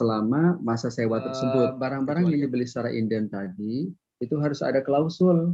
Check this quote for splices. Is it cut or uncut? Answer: cut